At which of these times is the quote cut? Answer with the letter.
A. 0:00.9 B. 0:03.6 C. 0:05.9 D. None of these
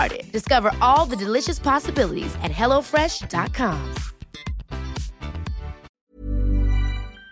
C